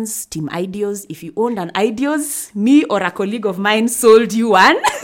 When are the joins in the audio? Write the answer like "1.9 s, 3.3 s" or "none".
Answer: none